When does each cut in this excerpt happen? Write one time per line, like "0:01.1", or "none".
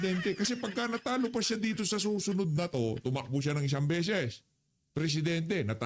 none